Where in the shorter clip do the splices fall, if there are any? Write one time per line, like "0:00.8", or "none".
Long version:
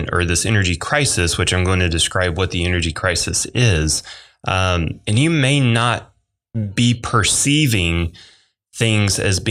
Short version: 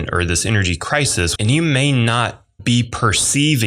0:01.3
0:02.5